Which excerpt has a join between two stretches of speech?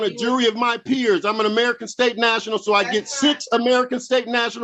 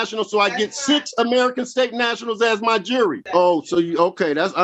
second; 1 cut; at 3.2 s

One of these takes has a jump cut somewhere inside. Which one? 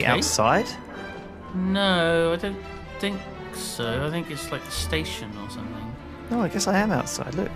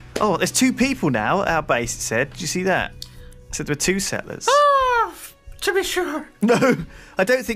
second; 1 cut; at 4.1 s

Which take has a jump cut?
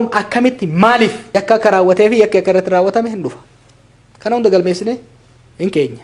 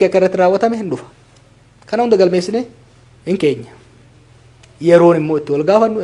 first; 1 cut; at 1.2 s

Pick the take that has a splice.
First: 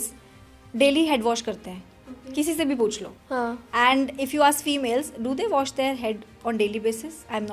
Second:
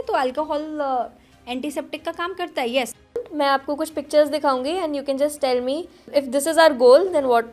second; 2 cuts; at 3.2 s, 6.0 s

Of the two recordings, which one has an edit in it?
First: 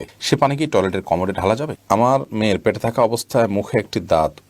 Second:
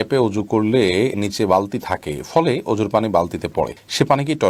first; 1 cut; at 1.8 s

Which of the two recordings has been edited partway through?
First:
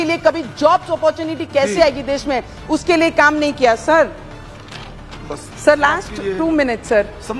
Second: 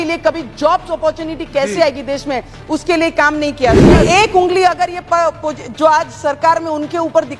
second; 1 cut; at 4.0 s

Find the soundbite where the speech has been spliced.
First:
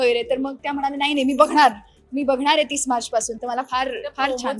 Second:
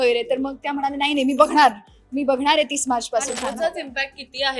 second; 1 cut; at 3.4 s

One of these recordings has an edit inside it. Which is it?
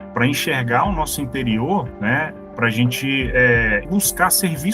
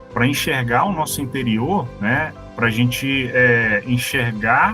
first; 1 cut; at 3.8 s

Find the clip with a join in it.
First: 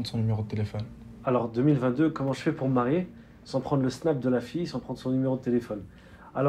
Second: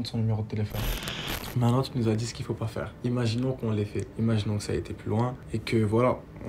second; 4 cuts; at 1.0 s, 2.9 s, 4.1 s, 5.4 s

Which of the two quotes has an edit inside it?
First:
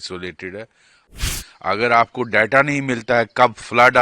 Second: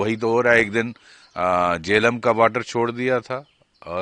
first; 1 cut; at 1.3 s

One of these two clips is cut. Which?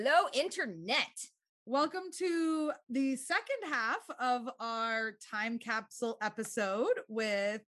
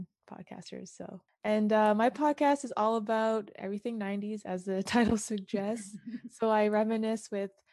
second; 1 cut; at 1.3 s

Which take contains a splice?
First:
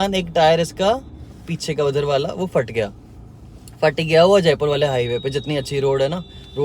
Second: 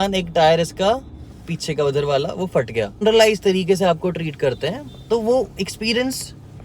second; 1 cut; at 3.0 s

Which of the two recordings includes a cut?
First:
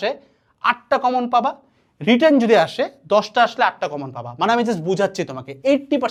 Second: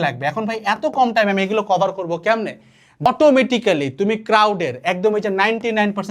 second; 1 cut; at 3.1 s

